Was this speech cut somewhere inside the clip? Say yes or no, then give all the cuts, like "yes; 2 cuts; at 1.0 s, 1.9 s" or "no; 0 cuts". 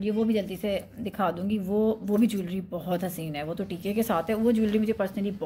no; 0 cuts